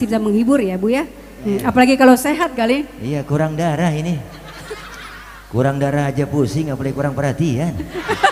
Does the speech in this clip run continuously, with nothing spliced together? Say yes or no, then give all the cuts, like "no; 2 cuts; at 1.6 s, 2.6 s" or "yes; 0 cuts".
yes; 0 cuts